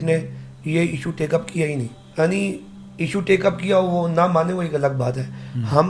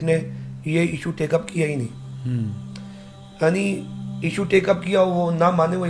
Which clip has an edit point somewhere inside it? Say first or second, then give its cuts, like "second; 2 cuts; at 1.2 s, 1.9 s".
first; 1 cut; at 2.0 s